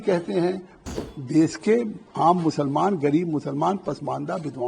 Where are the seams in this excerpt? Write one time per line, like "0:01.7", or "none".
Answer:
0:00.9